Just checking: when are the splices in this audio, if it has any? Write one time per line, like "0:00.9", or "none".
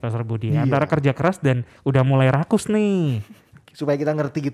none